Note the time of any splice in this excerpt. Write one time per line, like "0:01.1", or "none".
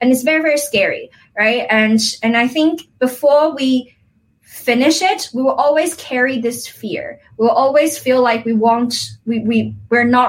none

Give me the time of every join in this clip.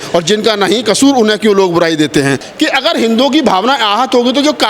0:02.5

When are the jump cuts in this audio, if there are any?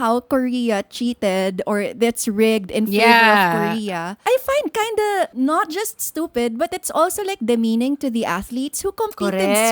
0:04.2
0:05.3

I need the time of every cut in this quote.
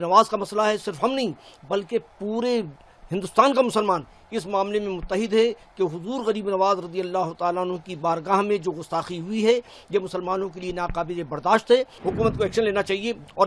0:11.9

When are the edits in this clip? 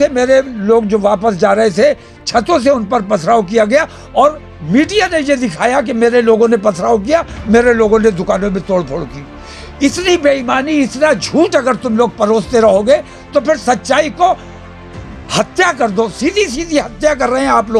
none

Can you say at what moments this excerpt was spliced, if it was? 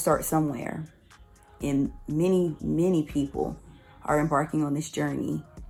none

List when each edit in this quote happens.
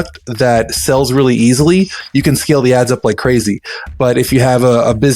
none

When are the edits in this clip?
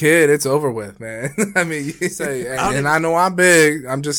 0:02.4

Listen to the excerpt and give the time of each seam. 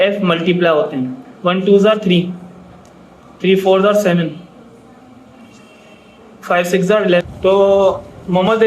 0:07.2

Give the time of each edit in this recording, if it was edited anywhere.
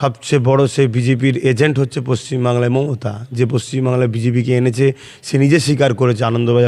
none

